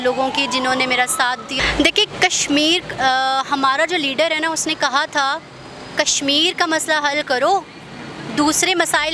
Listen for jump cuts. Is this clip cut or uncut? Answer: cut